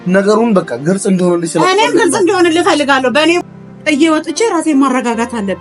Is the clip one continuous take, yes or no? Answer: no